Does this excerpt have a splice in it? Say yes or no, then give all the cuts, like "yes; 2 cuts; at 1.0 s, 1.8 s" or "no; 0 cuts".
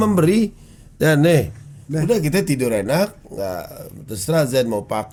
no; 0 cuts